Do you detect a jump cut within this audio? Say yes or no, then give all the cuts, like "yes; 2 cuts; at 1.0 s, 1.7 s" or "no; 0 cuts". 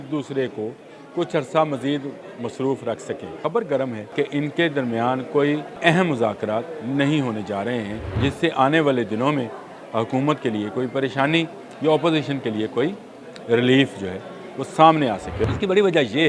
yes; 5 cuts; at 3.3 s, 4.1 s, 5.7 s, 8.0 s, 15.5 s